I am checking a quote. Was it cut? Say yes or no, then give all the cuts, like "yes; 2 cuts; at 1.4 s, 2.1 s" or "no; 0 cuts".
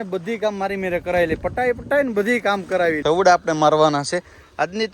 yes; 1 cut; at 3.0 s